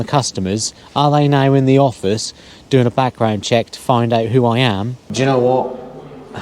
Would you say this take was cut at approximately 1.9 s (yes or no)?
no